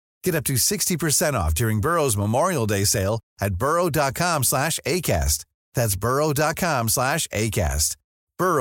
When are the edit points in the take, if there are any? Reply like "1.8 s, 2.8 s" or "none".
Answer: none